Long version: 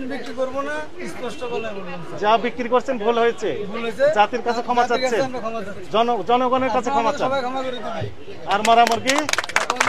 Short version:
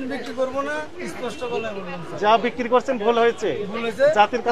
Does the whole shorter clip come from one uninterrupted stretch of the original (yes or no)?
yes